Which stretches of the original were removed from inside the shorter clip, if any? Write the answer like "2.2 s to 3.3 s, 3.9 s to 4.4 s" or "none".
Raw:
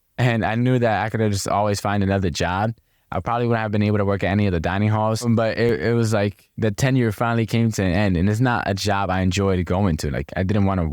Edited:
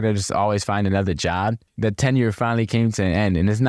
2.8 s to 6.5 s